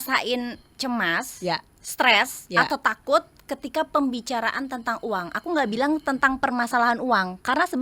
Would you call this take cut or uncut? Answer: uncut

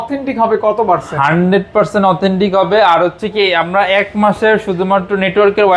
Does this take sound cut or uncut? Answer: uncut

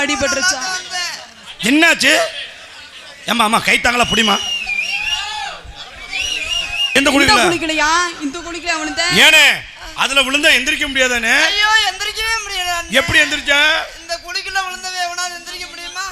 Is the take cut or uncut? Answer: cut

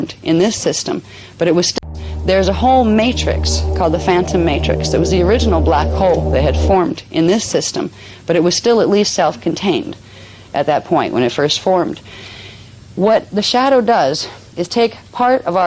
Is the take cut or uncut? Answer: cut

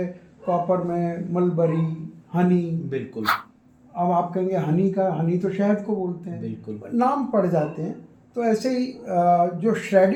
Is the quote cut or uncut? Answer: uncut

